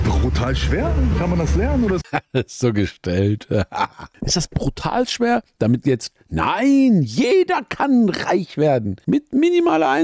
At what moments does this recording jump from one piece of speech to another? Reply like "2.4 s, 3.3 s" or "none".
2.1 s, 4.1 s, 8.9 s